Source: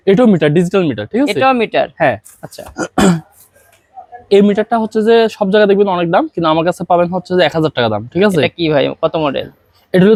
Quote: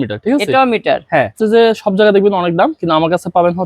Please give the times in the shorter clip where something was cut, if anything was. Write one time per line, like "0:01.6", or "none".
0:01.3